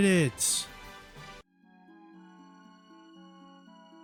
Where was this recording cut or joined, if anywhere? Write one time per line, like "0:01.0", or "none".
none